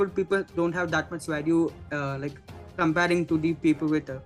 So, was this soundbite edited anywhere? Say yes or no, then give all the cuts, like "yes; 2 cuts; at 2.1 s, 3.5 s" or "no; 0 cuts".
no; 0 cuts